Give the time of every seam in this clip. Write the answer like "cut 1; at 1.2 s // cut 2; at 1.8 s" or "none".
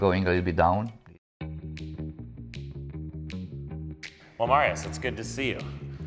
cut 1; at 1.0 s

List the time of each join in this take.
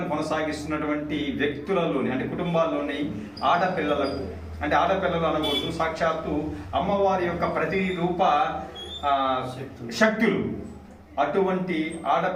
none

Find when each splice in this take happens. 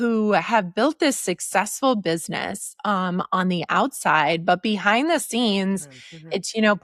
none

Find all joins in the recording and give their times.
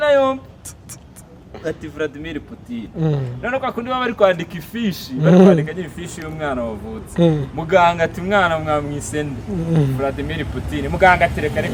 none

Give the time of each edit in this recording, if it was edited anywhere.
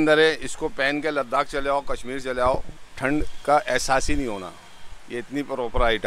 none

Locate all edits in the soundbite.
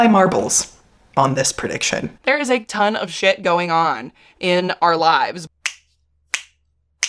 cut 1; at 2.1 s // cut 2; at 5.4 s

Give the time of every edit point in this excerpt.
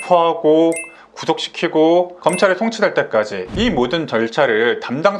none

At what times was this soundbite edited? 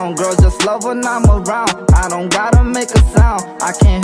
none

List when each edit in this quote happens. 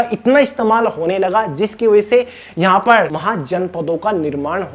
cut 1; at 3.2 s

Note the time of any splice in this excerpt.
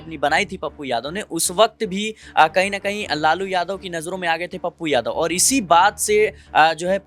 none

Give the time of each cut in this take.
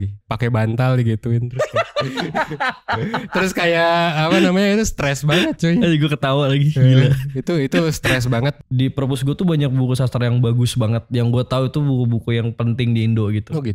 cut 1; at 8.6 s

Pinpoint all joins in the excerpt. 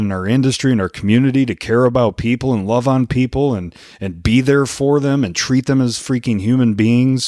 none

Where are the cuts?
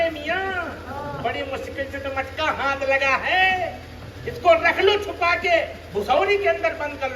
none

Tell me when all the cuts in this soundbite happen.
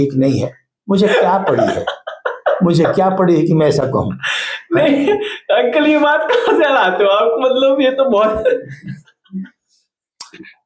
none

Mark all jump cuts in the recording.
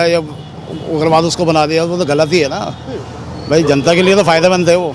none

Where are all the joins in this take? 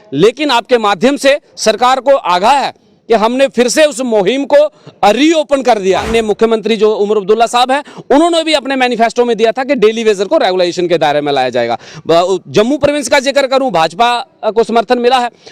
cut 1; at 6.1 s

